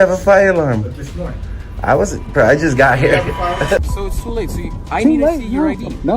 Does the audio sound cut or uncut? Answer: cut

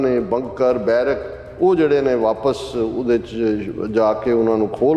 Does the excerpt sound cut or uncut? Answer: uncut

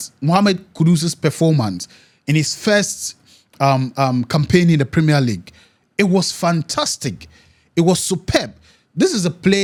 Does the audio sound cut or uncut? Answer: uncut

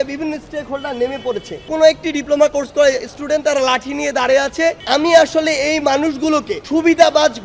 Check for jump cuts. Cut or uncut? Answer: cut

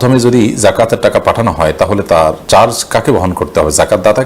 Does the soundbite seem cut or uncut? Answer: cut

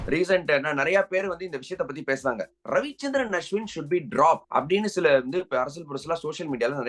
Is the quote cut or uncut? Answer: uncut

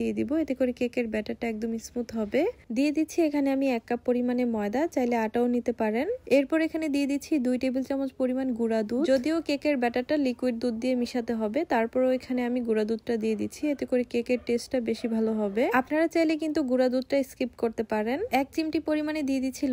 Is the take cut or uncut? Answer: cut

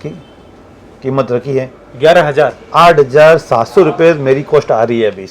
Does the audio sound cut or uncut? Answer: uncut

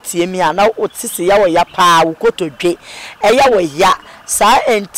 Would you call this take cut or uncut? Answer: uncut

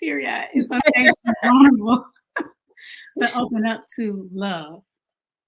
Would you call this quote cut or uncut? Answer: uncut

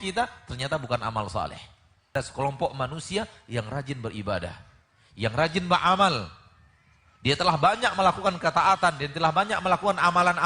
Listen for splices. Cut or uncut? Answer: cut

